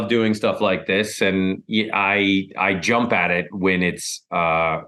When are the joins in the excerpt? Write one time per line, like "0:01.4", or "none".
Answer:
none